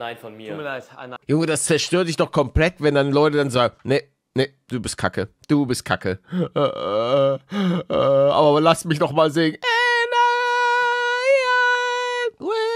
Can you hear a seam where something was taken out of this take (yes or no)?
yes